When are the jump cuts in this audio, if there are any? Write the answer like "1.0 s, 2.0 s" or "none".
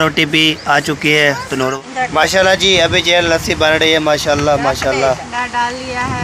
1.7 s, 5.3 s